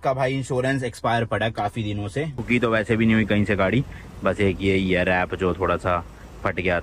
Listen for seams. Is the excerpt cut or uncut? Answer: cut